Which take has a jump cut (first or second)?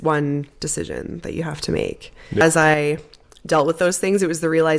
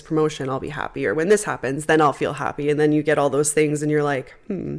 first